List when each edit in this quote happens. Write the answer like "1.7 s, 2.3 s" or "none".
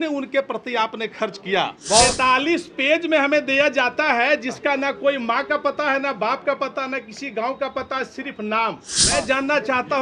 2.1 s, 8.9 s